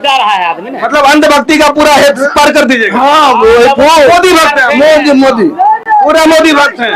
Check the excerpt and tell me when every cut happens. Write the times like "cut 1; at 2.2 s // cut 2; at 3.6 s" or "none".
none

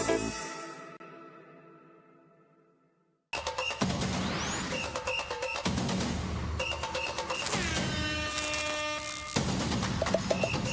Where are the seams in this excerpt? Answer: cut 1; at 1.0 s // cut 2; at 3.8 s

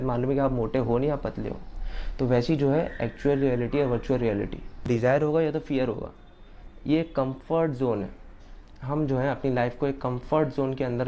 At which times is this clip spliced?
cut 1; at 4.8 s

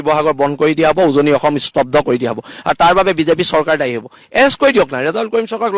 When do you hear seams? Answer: none

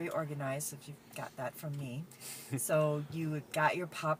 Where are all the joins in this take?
none

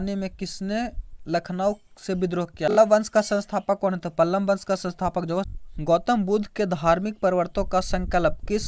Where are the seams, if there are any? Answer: cut 1; at 2.7 s // cut 2; at 5.5 s

